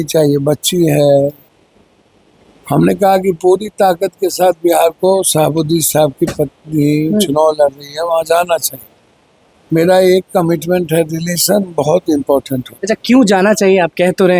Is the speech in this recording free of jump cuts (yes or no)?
yes